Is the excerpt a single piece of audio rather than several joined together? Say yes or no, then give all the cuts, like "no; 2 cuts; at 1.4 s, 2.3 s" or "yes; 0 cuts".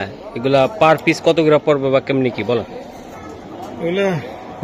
yes; 0 cuts